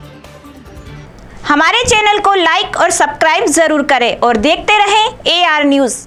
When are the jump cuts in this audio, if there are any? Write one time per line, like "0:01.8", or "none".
none